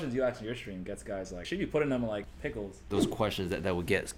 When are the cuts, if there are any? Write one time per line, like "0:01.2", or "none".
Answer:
0:01.4
0:02.9